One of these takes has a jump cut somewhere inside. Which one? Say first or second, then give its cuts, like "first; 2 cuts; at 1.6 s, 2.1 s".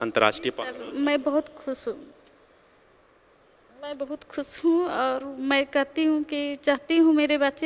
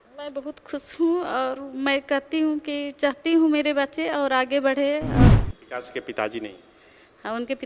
second; 1 cut; at 5.3 s